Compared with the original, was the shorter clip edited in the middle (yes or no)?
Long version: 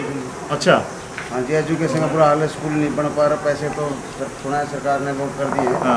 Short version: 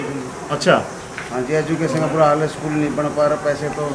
no